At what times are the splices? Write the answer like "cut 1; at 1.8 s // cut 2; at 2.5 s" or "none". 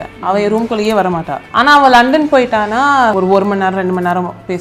cut 1; at 1.4 s // cut 2; at 3.1 s